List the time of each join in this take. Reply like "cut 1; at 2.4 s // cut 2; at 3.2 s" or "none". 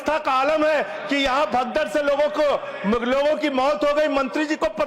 none